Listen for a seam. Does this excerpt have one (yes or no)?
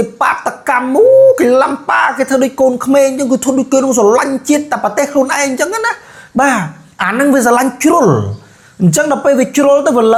no